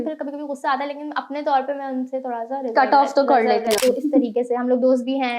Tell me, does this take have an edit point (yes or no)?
yes